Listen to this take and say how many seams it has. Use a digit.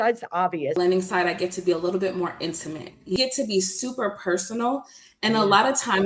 2